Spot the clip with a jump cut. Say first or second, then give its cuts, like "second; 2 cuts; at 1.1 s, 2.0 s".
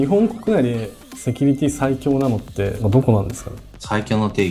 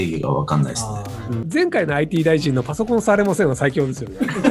second; 1 cut; at 1.4 s